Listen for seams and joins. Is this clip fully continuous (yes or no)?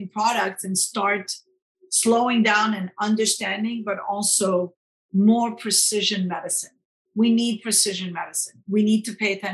no